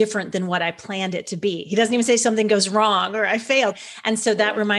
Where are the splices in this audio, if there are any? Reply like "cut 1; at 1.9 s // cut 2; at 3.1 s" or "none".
cut 1; at 3.7 s